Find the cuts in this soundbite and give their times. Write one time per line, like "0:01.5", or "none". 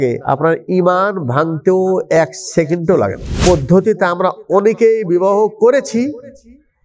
0:03.3